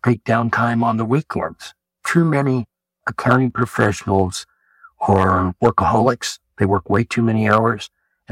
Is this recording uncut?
yes; 0 cuts

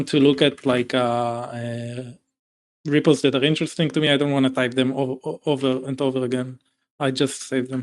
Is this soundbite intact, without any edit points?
yes; 0 cuts

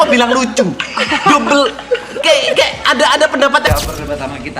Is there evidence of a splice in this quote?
yes; 1 cut; at 3.7 s

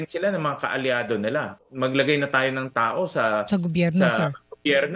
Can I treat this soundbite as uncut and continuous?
no; 1 cut; at 1.7 s

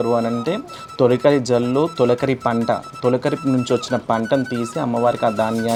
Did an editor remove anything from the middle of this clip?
no; 0 cuts

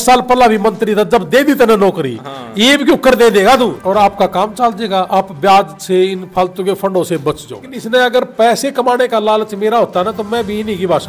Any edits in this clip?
yes; 2 cuts; at 3.8 s, 7.7 s

